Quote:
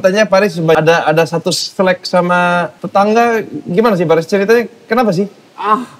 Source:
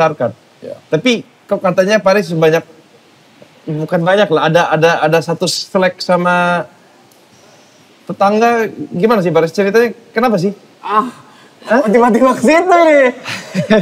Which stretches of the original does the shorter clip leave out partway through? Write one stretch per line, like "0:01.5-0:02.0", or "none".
0:02.5-0:04.7
0:06.7-0:08.0

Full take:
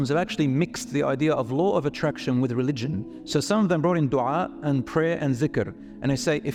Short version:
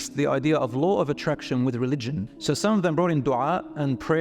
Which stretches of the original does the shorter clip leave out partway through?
0:03.1-0:03.2

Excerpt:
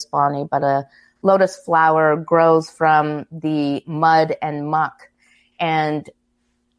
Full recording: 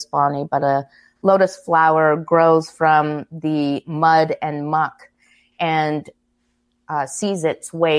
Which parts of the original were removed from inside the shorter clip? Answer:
none

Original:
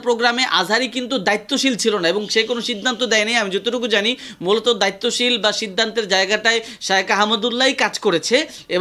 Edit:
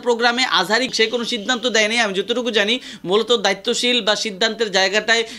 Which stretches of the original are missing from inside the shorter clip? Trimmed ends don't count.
0:00.9-0:02.3

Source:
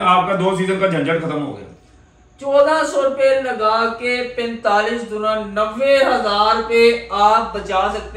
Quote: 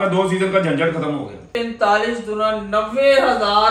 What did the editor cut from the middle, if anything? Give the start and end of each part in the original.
0:01.8-0:04.3

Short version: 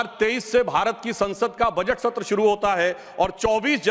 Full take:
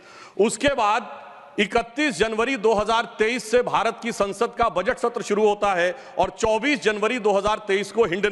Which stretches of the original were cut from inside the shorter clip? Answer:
none

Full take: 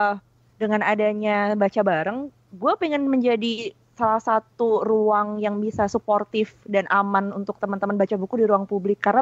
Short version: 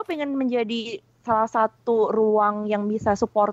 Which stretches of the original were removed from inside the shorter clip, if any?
none

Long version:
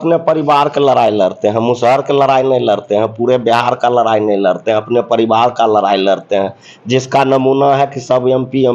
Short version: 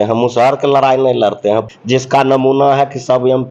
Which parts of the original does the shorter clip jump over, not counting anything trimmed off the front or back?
0:03.1-0:06.7

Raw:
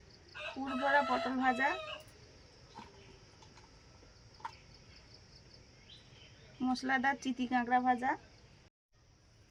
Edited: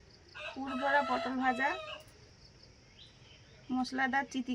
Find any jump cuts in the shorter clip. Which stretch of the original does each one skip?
0:02.3-0:05.2

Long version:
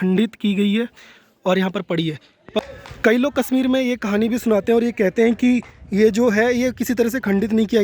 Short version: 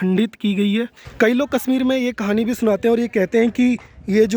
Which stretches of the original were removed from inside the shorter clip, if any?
0:01.0-0:02.8

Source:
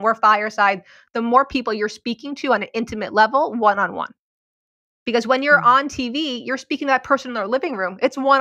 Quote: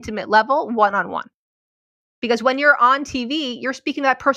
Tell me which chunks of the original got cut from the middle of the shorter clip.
none

